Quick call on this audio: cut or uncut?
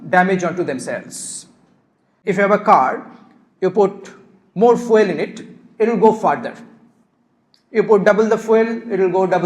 cut